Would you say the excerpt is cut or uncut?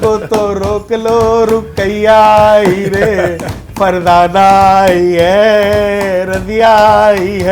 uncut